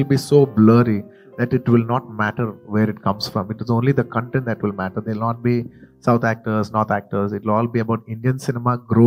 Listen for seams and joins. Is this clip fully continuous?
yes; 0 cuts

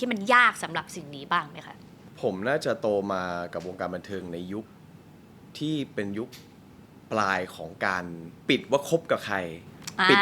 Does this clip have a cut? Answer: yes; 1 cut; at 8.3 s

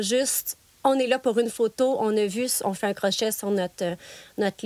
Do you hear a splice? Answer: no; 0 cuts

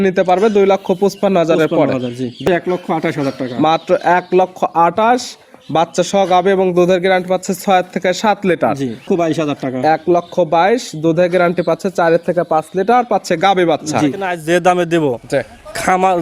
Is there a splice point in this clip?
yes; 3 cuts; at 2.4 s, 9.0 s, 14.3 s

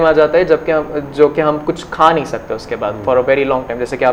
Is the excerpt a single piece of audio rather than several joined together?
yes; 0 cuts

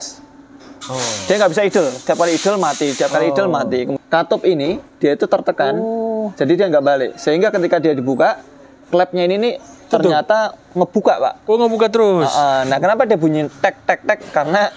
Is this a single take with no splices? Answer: no; 1 cut; at 3.9 s

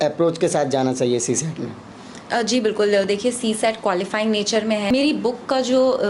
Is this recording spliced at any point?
yes; 1 cut; at 4.9 s

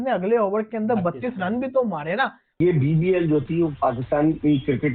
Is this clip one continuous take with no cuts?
no; 1 cut; at 2.6 s

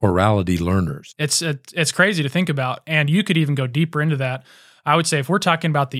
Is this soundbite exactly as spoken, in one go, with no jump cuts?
no; 1 cut; at 1.1 s

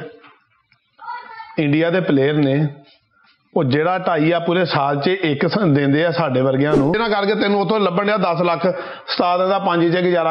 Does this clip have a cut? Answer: yes; 1 cut; at 7.0 s

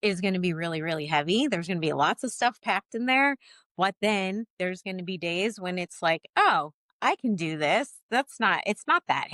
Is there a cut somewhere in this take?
no; 0 cuts

